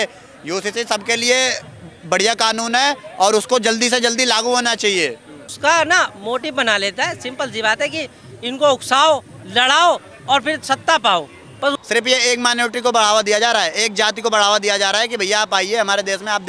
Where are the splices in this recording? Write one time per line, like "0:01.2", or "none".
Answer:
0:05.5
0:11.8